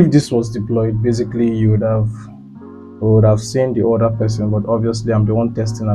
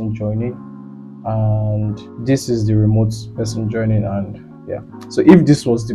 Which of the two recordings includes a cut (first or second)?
second